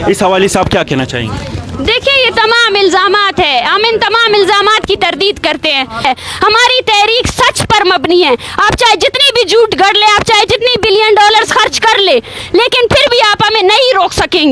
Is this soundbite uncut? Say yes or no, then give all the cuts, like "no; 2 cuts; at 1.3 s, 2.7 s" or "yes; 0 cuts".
no; 1 cut; at 6.0 s